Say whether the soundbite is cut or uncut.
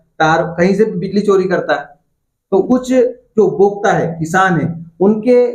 cut